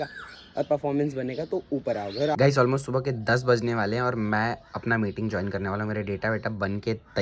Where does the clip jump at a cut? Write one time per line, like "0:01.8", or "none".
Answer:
0:02.3